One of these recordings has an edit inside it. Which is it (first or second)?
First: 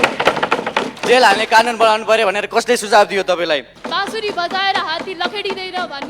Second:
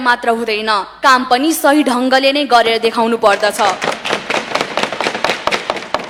first